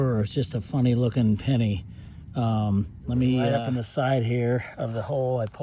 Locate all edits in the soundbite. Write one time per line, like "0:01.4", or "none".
0:03.5